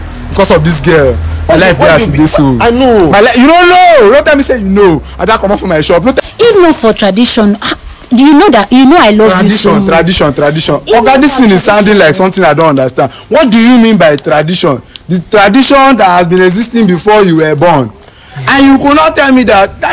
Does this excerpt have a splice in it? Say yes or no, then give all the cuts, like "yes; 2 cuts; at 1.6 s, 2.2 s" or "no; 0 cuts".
yes; 1 cut; at 6.2 s